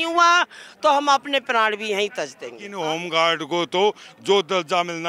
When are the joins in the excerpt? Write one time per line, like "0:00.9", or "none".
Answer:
0:02.7